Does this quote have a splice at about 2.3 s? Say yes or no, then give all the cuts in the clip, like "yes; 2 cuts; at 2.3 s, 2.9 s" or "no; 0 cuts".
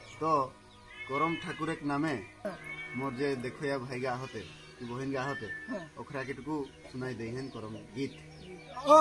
yes; 1 cut; at 2.3 s